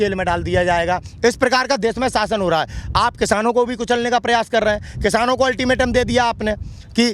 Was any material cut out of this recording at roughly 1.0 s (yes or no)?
no